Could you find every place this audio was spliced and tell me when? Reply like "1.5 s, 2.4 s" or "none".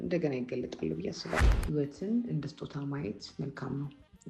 1.4 s